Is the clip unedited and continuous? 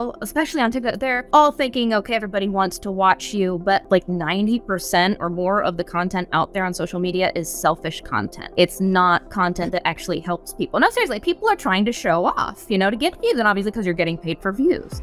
no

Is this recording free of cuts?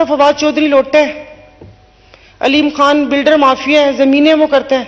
yes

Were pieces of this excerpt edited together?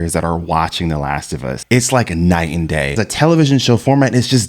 yes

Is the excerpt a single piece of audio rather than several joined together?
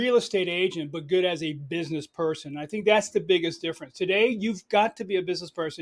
yes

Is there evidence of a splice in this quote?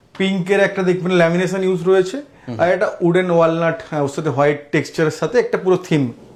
no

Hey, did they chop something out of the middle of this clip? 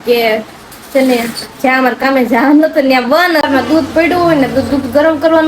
yes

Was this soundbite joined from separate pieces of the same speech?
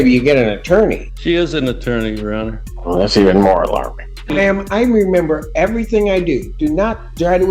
yes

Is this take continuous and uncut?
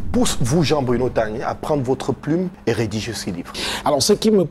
no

